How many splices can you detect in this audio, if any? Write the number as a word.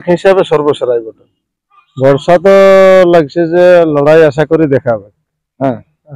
one